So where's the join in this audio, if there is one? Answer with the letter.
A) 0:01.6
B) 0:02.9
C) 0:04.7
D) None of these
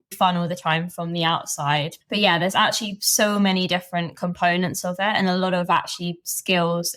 D